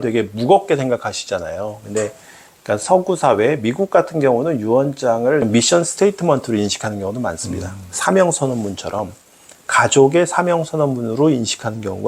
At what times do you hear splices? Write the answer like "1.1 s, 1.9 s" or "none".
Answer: none